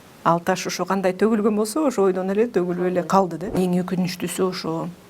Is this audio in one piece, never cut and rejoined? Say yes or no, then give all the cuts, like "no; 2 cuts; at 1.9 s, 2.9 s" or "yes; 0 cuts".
no; 1 cut; at 3.5 s